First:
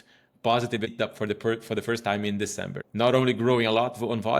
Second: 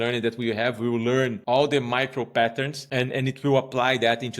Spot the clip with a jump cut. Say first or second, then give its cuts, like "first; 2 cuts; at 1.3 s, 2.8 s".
second; 2 cuts; at 1.4 s, 2.8 s